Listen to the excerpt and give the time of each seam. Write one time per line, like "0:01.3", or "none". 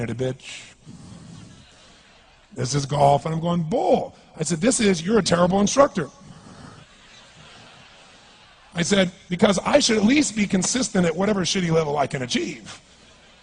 none

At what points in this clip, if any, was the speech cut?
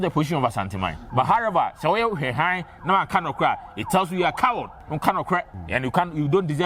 0:01.0
0:04.8
0:05.6

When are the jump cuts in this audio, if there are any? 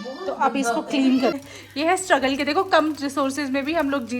0:01.4

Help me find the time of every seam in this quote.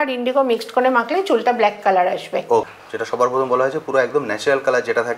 0:02.7

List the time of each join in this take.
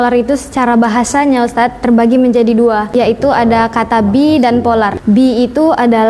0:02.9
0:05.0

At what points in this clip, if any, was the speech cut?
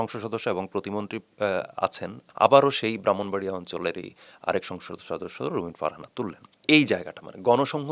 0:02.1
0:06.5

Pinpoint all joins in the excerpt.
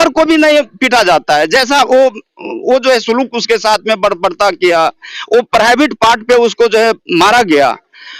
none

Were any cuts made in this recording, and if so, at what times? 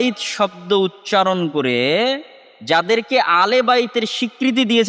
none

